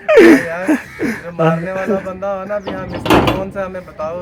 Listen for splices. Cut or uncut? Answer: uncut